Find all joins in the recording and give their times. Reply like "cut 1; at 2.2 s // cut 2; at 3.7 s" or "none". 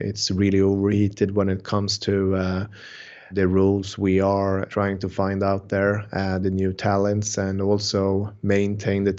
cut 1; at 3.3 s // cut 2; at 4.7 s